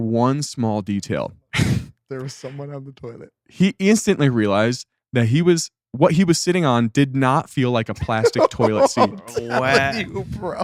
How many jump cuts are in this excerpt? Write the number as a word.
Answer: zero